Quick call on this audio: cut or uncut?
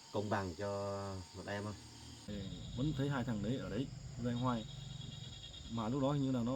cut